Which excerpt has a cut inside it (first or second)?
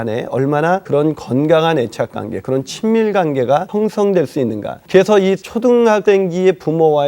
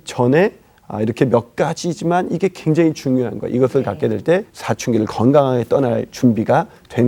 first